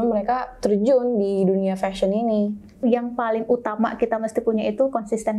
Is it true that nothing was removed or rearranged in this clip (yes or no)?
no